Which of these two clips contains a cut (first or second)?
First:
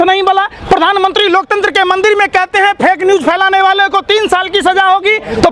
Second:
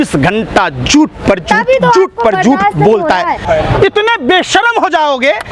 second